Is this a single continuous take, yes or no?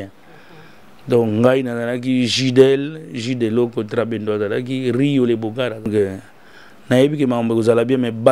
no